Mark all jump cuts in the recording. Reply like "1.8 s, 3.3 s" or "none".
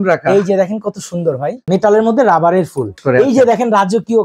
1.5 s, 3.0 s